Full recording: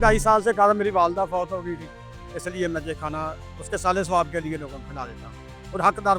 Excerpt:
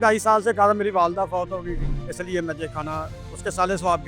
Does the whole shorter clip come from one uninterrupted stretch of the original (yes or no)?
no